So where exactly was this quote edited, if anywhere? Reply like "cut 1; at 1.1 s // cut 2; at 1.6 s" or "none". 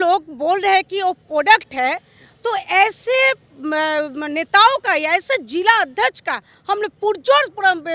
none